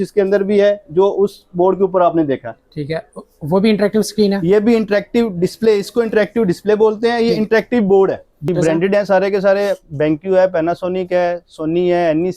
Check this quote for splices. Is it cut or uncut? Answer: cut